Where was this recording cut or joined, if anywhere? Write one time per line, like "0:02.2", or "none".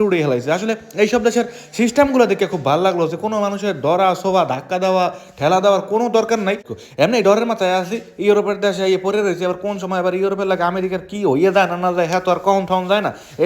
0:06.7